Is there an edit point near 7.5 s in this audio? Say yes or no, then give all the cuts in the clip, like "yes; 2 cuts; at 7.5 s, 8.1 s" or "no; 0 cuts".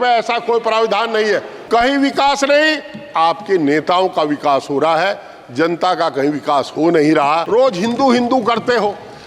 yes; 2 cuts; at 1.5 s, 7.5 s